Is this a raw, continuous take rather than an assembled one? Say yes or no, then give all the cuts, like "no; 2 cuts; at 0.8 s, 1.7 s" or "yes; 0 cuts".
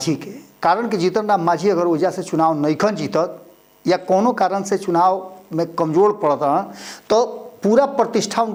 yes; 0 cuts